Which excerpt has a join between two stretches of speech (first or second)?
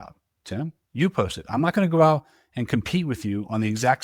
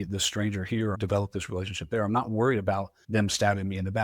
second